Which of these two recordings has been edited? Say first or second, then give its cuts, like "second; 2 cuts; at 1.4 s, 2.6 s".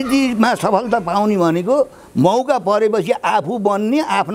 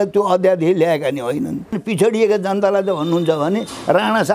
second; 1 cut; at 1.8 s